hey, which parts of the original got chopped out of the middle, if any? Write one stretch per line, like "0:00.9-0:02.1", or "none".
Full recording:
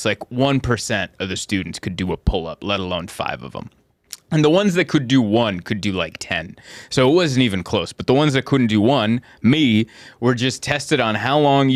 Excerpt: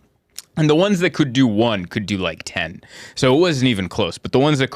none

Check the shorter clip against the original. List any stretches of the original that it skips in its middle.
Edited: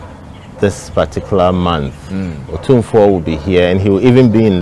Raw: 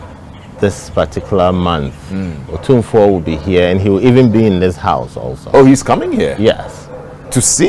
none

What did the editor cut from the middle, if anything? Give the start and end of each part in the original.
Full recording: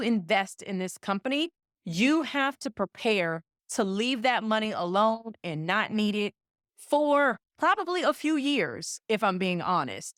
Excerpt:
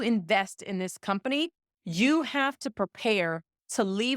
none

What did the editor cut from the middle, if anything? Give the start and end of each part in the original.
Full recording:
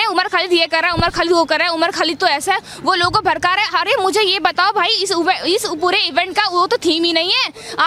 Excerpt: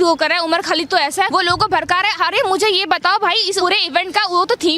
0:02.6-0:02.8
0:05.1-0:05.8

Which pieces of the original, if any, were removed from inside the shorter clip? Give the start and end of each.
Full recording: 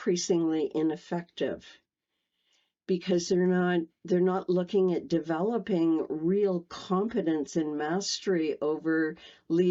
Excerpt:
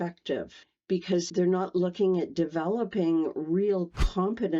0:02.3-0:04.0

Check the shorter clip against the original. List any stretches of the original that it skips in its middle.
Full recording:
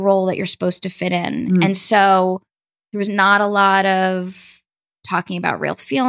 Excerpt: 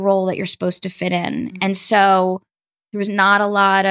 none

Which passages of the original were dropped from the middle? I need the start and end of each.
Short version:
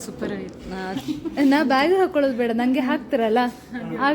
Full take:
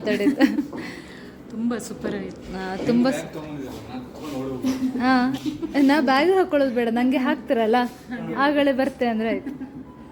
0:02.8-0:05.3

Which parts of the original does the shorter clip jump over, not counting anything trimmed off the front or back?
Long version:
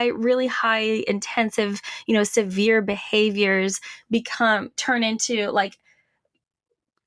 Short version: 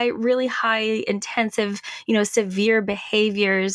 none

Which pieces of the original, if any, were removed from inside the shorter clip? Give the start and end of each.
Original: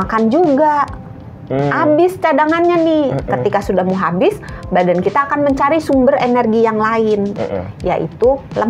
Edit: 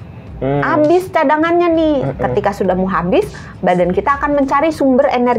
none

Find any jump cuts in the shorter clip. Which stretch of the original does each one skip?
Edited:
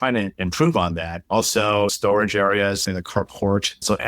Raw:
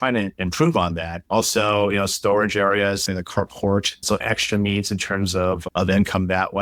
0:01.9-0:02.1

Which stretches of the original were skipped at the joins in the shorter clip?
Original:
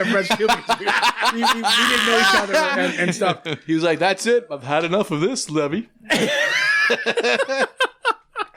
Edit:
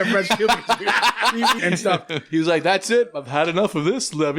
0:01.6-0:02.9

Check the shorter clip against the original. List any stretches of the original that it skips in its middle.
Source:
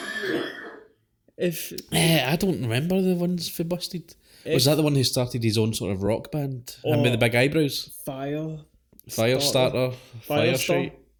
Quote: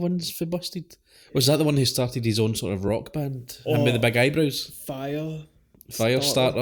none

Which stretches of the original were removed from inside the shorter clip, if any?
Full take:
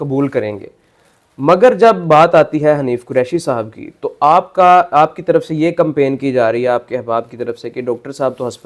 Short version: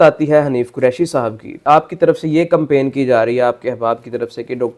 0:04.0-0:04.9

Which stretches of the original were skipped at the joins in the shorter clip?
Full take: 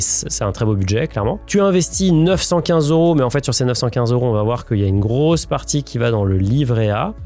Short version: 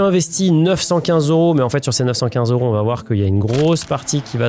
none

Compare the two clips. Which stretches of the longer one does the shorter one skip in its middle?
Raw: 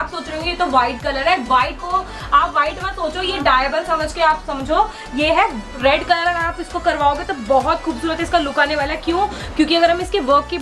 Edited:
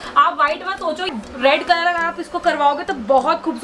0:03.3-0:05.5

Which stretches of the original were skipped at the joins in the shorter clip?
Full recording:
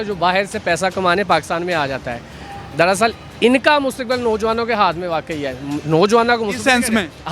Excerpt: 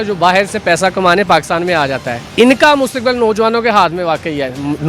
0:02.2-0:03.3

